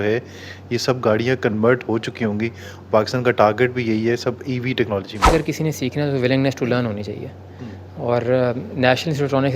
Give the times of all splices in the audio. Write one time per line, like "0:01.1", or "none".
0:05.3